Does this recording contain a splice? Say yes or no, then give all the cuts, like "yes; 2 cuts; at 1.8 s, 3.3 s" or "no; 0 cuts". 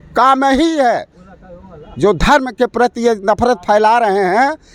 no; 0 cuts